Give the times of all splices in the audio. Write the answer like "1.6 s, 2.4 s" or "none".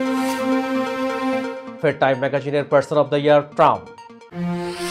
1.6 s